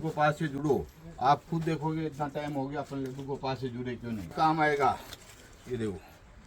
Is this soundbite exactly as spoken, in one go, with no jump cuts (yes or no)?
no